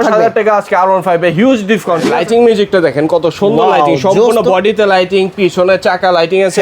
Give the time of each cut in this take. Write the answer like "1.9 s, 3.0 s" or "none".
2.1 s